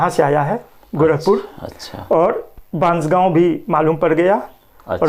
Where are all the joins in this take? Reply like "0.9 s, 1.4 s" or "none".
none